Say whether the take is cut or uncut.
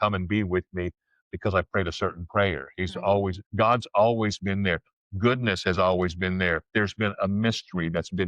cut